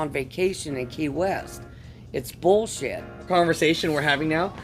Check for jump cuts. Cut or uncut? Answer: cut